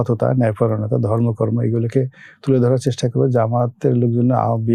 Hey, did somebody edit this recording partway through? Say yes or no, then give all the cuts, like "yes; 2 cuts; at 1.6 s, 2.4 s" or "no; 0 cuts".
no; 0 cuts